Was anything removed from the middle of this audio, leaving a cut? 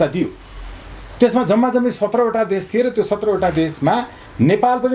no; 0 cuts

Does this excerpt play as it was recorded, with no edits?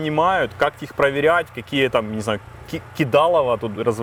yes; 0 cuts

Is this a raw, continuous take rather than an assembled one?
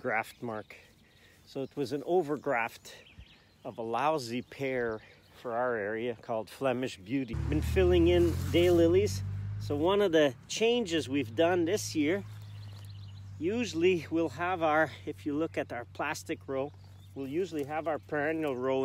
no; 1 cut; at 7.4 s

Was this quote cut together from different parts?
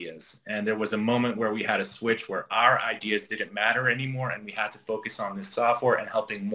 no; 0 cuts

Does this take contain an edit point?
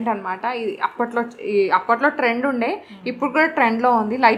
no; 0 cuts

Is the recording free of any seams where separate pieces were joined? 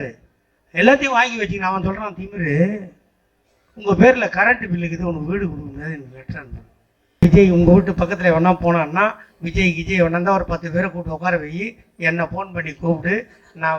no; 1 cut; at 7.2 s

